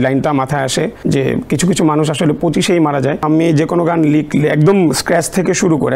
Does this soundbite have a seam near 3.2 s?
yes; 2 cuts; at 1.0 s, 3.2 s

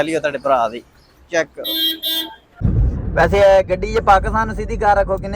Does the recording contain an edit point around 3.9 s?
no; 1 cut; at 2.6 s

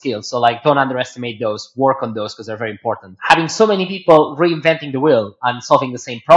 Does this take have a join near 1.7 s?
no; 1 cut; at 3.1 s

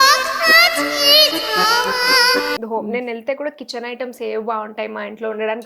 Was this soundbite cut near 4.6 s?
no; 1 cut; at 2.6 s

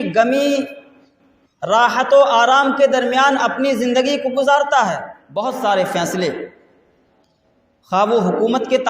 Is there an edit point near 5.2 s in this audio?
yes; 1 cut; at 5.2 s

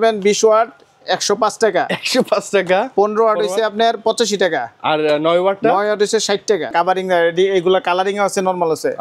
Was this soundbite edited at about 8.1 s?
no; 1 cut; at 6.7 s

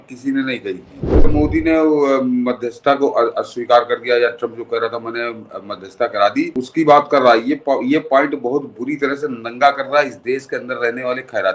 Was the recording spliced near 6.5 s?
yes; 2 cuts; at 1.3 s, 6.5 s

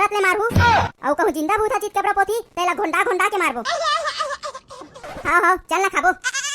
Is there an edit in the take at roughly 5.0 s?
yes; 1 cut; at 5.0 s

